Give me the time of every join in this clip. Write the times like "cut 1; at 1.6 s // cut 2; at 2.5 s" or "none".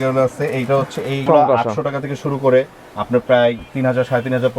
cut 1; at 1.2 s

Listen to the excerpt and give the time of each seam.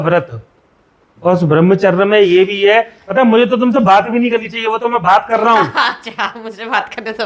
cut 1; at 3.0 s

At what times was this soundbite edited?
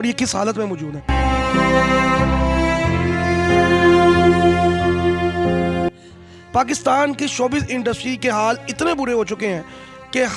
none

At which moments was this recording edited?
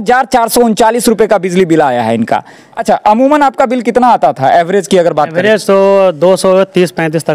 cut 1; at 2.7 s

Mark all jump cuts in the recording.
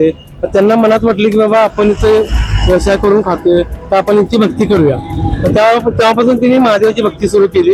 none

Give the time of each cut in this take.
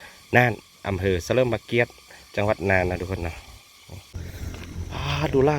cut 1; at 4.1 s

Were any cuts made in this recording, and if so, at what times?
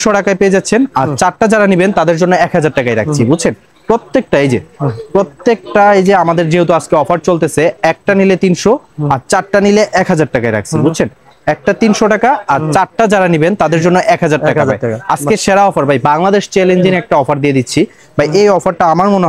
none

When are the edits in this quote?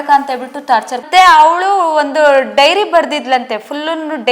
cut 1; at 1.1 s

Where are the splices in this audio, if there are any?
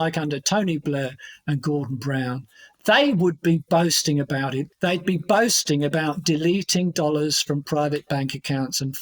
cut 1; at 4.7 s

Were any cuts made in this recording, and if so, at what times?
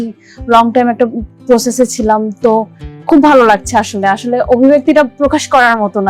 none

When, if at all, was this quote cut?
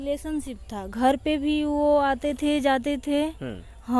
none

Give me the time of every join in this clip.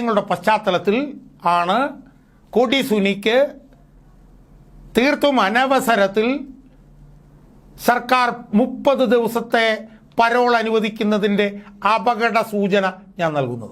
none

